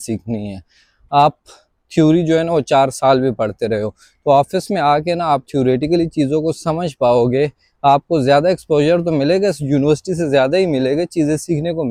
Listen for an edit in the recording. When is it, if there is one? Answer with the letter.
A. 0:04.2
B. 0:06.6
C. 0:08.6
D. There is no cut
D